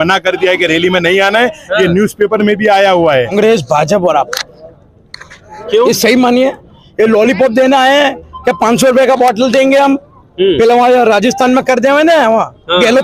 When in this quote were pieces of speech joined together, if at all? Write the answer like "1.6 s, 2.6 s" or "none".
3.3 s